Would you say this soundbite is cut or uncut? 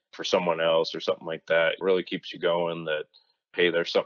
uncut